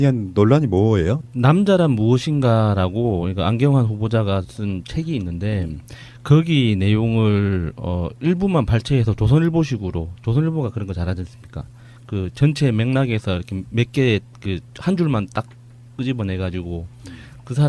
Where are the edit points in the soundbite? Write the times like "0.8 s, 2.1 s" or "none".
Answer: none